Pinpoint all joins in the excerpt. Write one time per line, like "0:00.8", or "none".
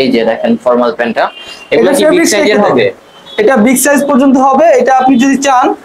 none

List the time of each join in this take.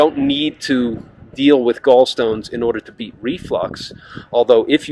none

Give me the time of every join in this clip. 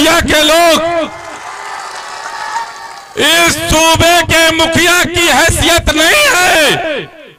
none

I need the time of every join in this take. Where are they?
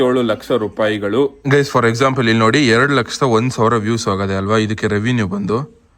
0:01.4

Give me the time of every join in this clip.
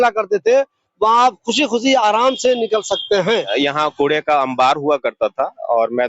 0:03.5

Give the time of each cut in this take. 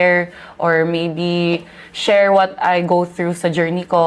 none

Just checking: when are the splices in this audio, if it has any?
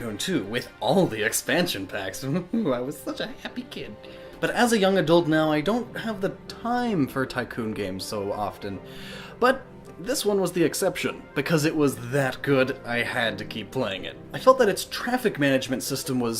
0:06.5

